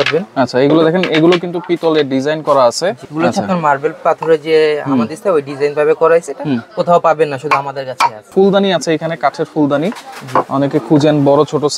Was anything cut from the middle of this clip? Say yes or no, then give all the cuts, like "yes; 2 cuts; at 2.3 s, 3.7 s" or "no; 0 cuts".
yes; 2 cuts; at 3.0 s, 8.3 s